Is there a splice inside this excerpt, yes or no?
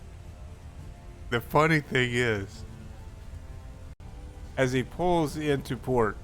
yes